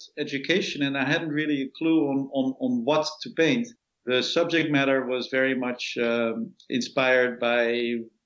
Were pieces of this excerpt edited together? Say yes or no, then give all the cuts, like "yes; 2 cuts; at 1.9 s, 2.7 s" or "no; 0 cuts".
yes; 1 cut; at 3.7 s